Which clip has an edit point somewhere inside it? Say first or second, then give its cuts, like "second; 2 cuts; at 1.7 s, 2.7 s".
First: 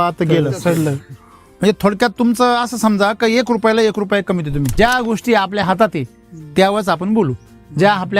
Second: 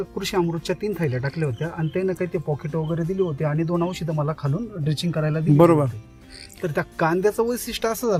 first; 2 cuts; at 1.4 s, 4.7 s